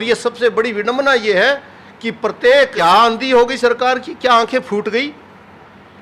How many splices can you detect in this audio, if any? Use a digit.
1